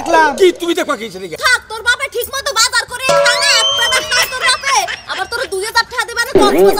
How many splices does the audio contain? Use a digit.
1